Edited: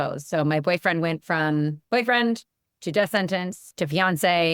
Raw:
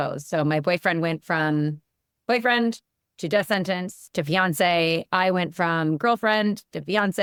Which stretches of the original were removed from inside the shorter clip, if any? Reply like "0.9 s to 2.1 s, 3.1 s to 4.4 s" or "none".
1.8 s to 2.2 s